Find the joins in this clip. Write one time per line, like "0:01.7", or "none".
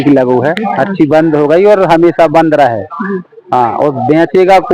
none